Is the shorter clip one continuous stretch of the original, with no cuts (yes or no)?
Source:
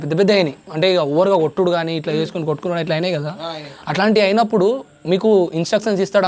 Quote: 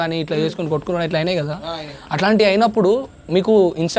yes